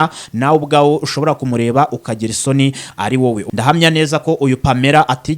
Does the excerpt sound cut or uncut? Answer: cut